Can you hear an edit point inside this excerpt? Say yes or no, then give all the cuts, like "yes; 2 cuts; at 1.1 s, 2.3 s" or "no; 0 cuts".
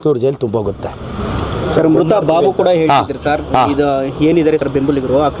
no; 0 cuts